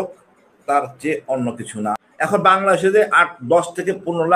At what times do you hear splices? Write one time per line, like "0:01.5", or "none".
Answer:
0:01.9